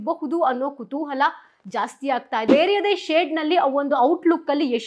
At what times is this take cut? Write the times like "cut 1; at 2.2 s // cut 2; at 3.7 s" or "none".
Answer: cut 1; at 2.4 s